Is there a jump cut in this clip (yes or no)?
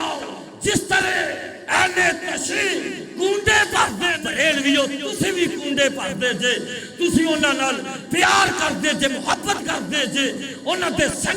yes